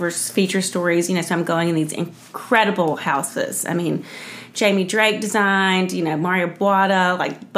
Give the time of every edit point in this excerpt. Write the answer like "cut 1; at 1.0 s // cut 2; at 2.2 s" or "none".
none

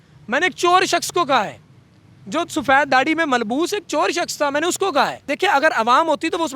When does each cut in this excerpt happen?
cut 1; at 5.3 s

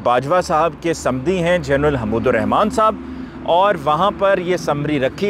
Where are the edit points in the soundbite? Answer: none

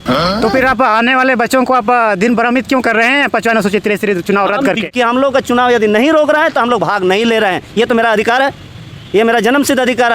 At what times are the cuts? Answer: cut 1; at 4.7 s

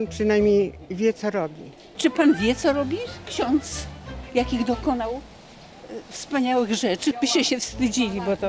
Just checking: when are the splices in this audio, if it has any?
cut 1; at 1.8 s // cut 2; at 7.2 s

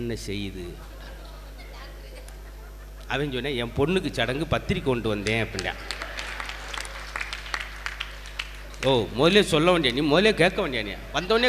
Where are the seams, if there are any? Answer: cut 1; at 8.7 s

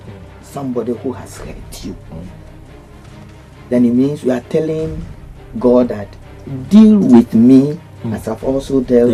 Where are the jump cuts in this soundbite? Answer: none

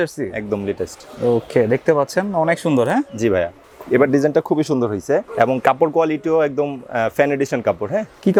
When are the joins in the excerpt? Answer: none

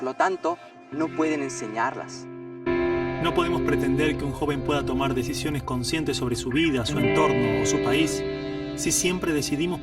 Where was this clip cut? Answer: cut 1; at 2.5 s

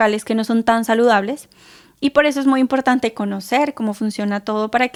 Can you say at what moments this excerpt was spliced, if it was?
none

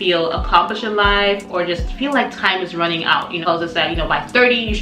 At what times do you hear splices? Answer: cut 1; at 3.4 s

